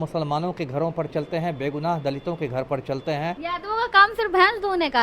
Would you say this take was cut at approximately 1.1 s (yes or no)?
no